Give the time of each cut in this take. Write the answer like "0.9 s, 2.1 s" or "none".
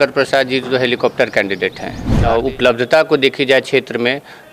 2.1 s